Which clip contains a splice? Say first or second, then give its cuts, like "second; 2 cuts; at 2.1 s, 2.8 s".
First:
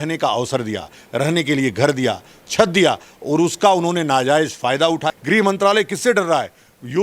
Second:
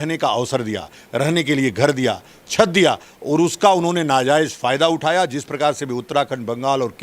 first; 1 cut; at 5.1 s